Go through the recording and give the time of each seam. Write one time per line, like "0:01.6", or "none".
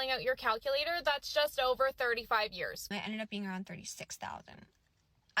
0:02.9